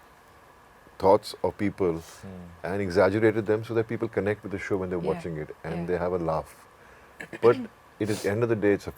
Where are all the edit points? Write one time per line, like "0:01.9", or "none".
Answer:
none

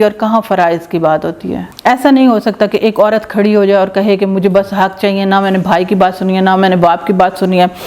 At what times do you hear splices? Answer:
0:01.7

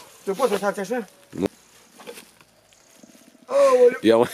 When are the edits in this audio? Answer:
0:01.5

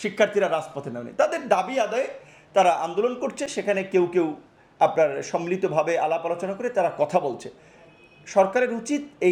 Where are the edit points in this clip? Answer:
none

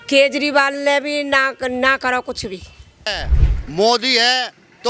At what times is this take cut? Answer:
0:03.1

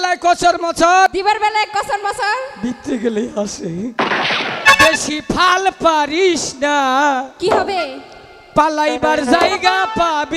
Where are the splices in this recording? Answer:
0:01.1
0:03.9

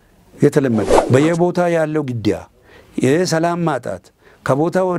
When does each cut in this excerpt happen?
0:01.0

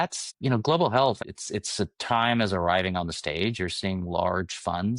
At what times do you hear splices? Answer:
0:01.2

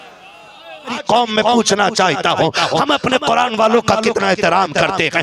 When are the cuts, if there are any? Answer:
0:01.0

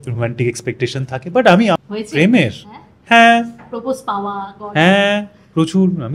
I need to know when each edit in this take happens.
0:01.8

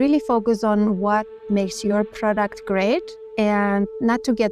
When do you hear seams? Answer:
0:01.4

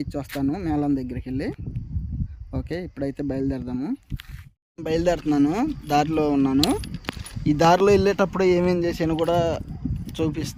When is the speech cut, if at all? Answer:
none

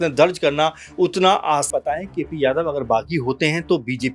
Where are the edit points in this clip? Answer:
0:01.7

